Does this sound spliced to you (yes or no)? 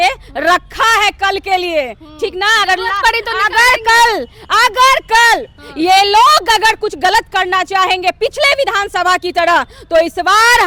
no